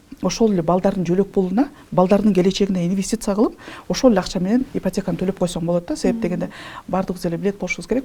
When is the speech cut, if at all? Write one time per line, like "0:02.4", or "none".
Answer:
none